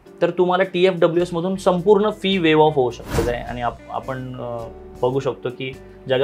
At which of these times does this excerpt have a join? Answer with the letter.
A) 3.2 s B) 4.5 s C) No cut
A